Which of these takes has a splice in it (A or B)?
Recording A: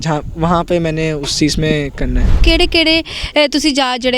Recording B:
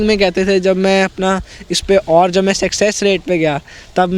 A